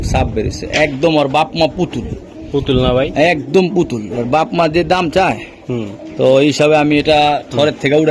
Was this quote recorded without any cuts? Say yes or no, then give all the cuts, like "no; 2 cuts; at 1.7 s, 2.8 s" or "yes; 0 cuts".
yes; 0 cuts